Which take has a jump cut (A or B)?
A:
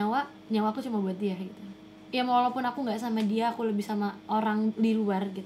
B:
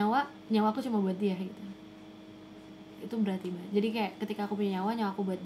A